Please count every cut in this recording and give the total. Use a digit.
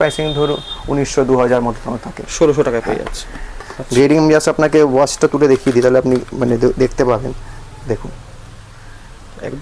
1